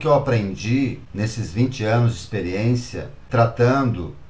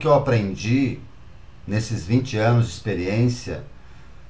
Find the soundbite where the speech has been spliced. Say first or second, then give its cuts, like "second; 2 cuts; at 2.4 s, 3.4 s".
first; 2 cuts; at 1.0 s, 3.2 s